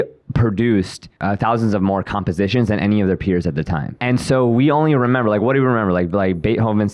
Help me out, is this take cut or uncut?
cut